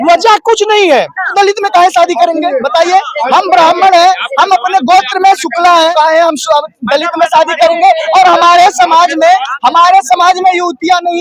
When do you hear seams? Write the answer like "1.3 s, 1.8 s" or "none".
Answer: 1.2 s, 5.9 s